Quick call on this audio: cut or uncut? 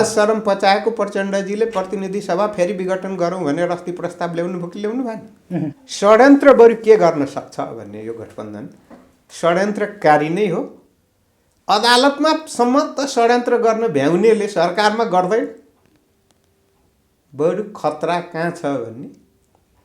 cut